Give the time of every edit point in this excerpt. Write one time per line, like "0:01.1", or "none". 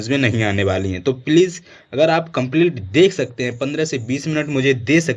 none